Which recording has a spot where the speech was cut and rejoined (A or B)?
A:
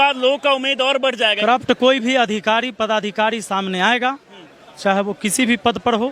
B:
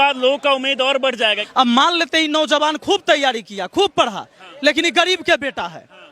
B